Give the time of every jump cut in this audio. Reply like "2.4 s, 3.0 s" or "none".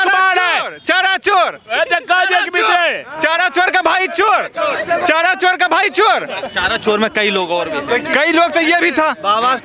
none

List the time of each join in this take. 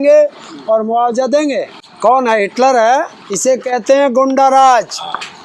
1.8 s, 3.2 s

